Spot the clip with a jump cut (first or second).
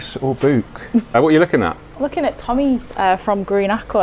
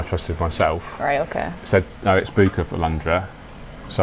first